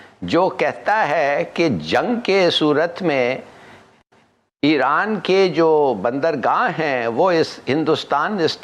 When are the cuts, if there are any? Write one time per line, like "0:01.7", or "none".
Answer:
none